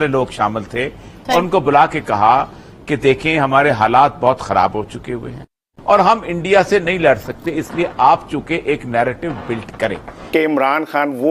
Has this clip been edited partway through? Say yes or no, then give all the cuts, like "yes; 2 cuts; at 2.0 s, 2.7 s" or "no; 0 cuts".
yes; 1 cut; at 10.2 s